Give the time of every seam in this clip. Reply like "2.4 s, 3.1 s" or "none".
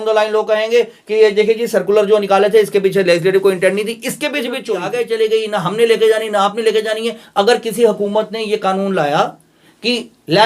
4.9 s